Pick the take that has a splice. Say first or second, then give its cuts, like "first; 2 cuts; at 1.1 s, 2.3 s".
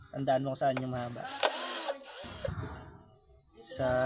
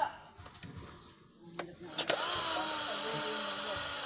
first; 1 cut; at 2.2 s